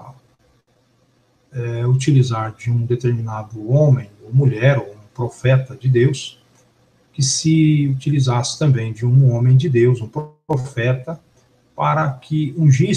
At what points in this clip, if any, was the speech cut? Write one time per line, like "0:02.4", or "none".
0:07.8